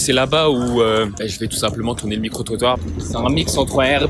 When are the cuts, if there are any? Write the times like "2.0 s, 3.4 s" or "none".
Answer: 1.1 s, 2.9 s